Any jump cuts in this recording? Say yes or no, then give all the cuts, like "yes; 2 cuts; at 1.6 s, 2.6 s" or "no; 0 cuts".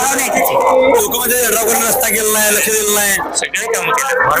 no; 0 cuts